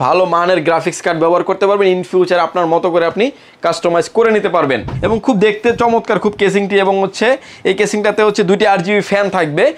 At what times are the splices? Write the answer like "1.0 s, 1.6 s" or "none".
4.9 s